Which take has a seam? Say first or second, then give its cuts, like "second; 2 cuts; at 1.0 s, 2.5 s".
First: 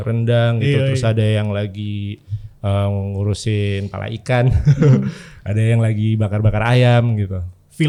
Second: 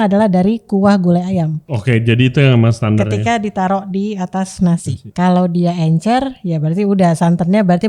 second; 2 cuts; at 1.7 s, 5.0 s